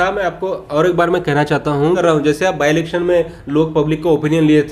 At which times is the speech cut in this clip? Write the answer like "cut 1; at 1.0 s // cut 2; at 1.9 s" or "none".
cut 1; at 2.0 s